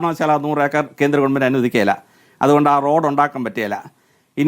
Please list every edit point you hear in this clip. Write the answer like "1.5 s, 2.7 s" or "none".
none